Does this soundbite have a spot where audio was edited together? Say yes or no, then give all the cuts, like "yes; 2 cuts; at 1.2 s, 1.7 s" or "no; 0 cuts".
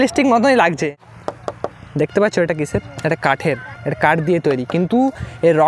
yes; 1 cut; at 0.9 s